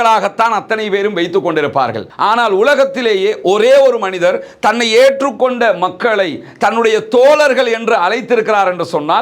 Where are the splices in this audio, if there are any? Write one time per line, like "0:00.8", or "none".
0:02.1

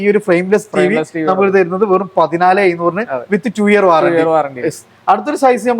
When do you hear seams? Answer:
none

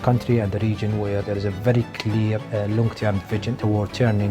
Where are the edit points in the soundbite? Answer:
0:01.2
0:02.4
0:03.6

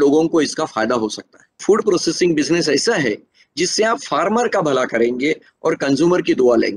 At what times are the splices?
0:01.6

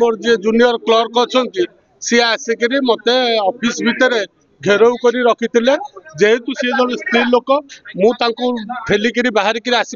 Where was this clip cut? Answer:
none

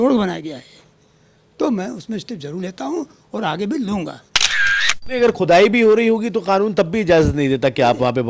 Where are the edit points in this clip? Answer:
0:04.6

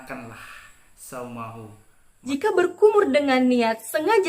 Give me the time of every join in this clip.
0:02.1

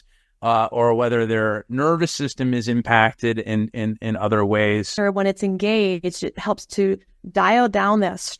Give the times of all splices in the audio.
0:04.9

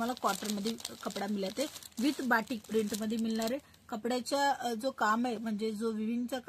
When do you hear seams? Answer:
none

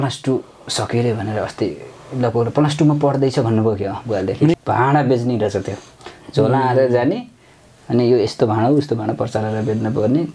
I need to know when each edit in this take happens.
0:04.6

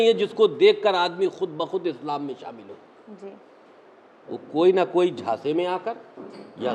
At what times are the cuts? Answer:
none

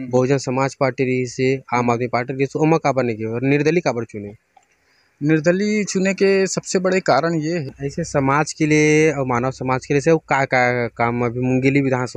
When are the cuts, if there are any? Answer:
0:07.7

